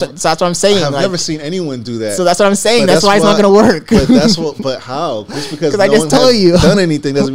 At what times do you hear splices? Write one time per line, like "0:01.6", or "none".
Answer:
none